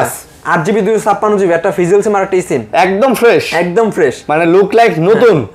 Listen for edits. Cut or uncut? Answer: uncut